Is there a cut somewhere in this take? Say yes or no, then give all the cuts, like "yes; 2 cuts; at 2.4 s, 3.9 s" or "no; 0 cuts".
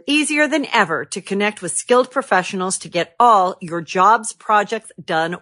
no; 0 cuts